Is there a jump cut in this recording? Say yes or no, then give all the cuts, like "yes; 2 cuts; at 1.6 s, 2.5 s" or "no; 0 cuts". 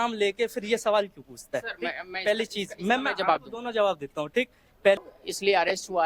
yes; 1 cut; at 5.1 s